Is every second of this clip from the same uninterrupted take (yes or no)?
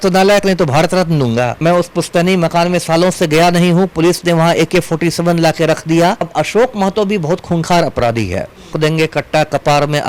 no